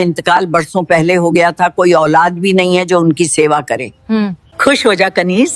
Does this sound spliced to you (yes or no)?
yes